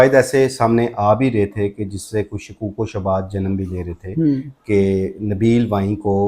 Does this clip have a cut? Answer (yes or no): no